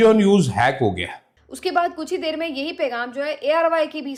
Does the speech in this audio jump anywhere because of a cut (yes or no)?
no